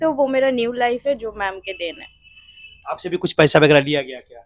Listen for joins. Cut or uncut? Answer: uncut